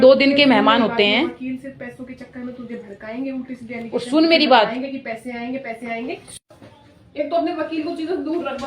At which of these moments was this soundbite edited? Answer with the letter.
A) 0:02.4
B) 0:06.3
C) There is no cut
B